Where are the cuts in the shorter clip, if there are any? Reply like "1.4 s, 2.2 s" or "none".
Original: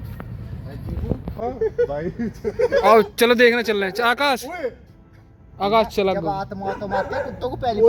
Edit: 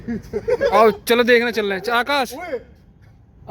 none